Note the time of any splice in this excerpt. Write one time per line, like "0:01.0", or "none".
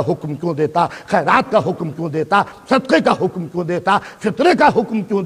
none